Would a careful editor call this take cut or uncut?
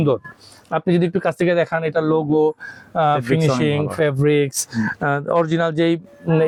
uncut